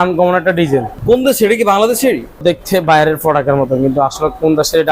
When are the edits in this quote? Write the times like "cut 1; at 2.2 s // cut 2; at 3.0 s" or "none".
cut 1; at 0.9 s // cut 2; at 2.4 s